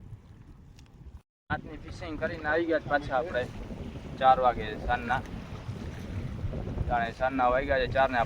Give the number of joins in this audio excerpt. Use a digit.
1